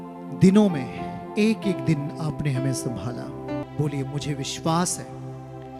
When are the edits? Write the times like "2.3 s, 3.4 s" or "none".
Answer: 3.6 s